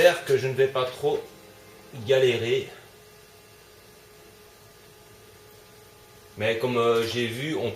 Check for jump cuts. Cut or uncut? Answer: cut